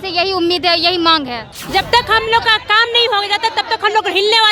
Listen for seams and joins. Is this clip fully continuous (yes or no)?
no